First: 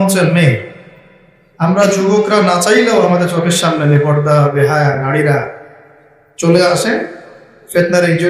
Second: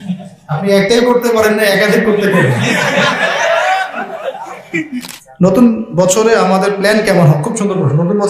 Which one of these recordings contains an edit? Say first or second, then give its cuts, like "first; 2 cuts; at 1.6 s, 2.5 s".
second; 1 cut; at 5.2 s